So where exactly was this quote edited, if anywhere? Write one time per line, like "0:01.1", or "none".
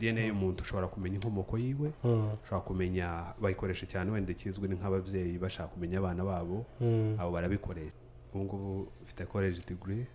0:08.0